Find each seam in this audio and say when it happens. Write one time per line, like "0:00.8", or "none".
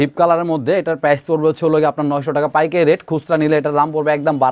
none